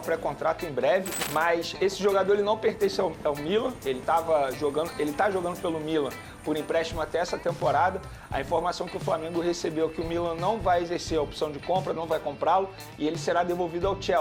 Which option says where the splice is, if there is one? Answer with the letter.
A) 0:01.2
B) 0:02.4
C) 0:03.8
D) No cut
A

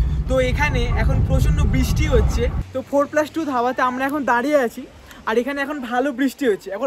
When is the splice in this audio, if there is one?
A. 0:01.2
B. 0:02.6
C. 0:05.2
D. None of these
B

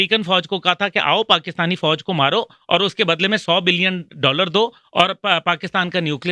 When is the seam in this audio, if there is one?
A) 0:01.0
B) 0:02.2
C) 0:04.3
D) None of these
D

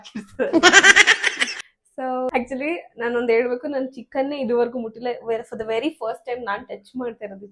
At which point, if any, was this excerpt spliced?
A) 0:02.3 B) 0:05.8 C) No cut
A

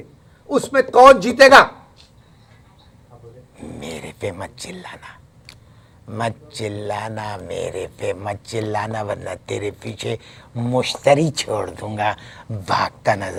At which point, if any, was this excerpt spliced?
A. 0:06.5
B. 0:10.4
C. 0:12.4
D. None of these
D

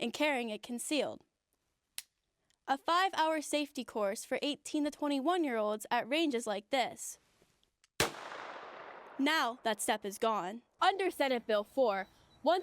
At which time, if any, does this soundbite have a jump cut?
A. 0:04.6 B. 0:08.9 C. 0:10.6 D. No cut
C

